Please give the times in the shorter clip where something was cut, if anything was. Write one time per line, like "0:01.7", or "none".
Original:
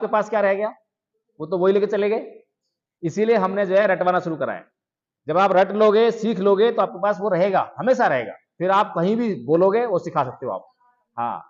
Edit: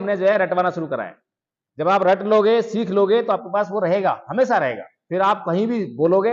none